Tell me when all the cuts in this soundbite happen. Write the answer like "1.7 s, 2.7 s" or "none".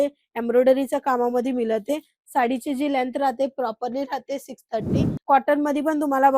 5.1 s